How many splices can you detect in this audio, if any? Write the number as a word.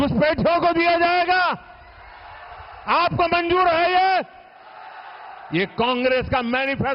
zero